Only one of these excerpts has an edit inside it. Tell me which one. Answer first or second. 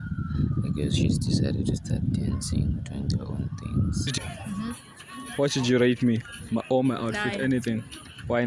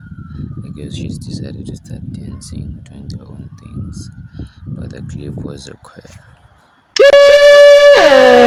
first